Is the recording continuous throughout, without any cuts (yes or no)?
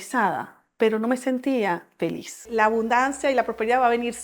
no